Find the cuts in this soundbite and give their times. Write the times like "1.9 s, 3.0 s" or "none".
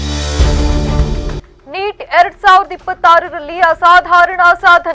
1.5 s

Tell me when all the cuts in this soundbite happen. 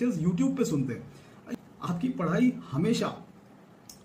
1.5 s

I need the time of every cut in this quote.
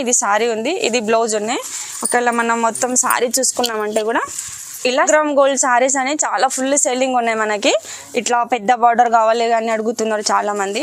5.0 s

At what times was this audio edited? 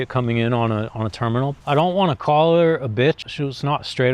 1.5 s, 3.3 s

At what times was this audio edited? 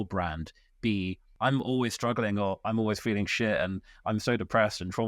1.3 s

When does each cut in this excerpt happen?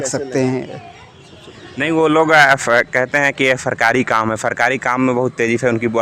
none

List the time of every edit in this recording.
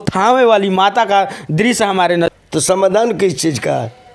2.3 s

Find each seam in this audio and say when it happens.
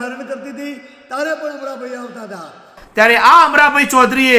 2.8 s

